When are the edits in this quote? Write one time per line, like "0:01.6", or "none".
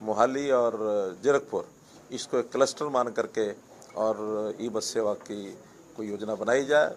none